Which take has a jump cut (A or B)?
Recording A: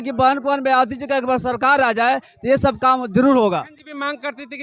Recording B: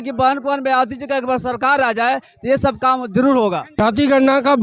B